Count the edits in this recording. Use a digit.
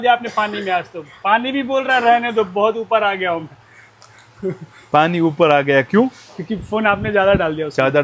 0